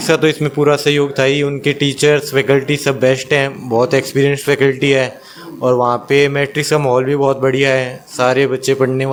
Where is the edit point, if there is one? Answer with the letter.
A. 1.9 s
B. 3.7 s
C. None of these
C